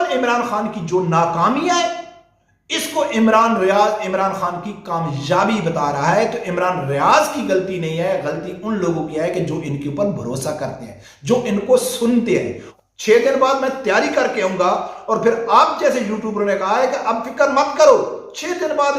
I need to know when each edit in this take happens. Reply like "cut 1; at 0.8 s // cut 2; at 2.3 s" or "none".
cut 1; at 12.6 s